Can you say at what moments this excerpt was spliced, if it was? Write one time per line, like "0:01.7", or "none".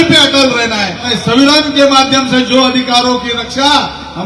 0:01.1